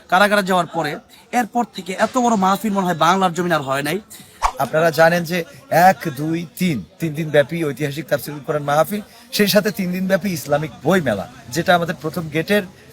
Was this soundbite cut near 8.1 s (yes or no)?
no